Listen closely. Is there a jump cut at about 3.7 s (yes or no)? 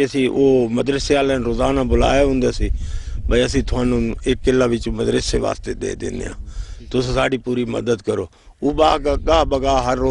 no